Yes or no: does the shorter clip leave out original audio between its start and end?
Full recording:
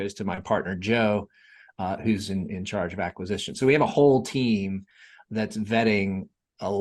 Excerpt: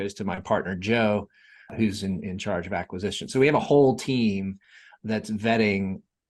yes